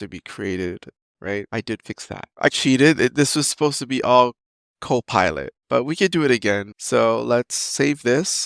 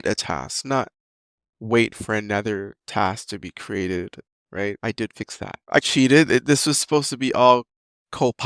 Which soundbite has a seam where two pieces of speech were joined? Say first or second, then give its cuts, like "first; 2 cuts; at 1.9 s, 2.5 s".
first; 1 cut; at 6.7 s